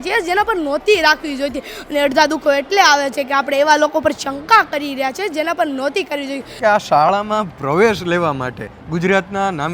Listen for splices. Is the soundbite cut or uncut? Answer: cut